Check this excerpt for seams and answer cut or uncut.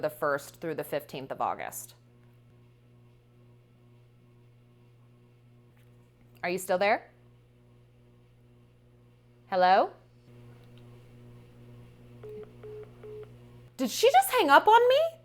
cut